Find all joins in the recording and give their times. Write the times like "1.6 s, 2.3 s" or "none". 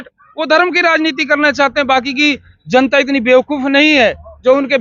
none